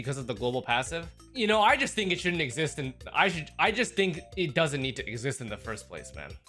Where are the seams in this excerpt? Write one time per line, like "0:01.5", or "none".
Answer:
none